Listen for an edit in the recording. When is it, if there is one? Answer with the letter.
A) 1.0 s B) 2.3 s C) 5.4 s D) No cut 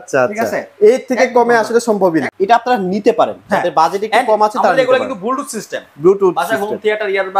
B